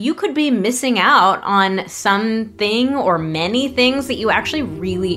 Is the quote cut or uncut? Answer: uncut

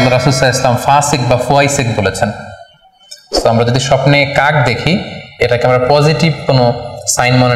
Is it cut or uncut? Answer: uncut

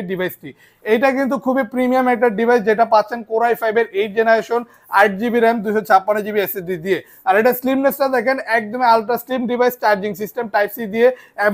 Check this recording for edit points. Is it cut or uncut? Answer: uncut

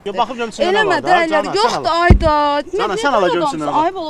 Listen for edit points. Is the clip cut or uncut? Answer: uncut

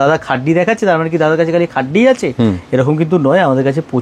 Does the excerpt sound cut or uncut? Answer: uncut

